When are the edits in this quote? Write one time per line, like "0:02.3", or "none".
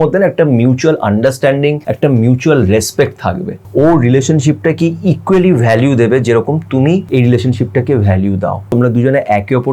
0:01.9
0:03.6
0:07.1
0:08.7